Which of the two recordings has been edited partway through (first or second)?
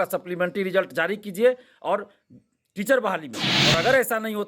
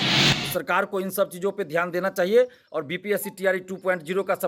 first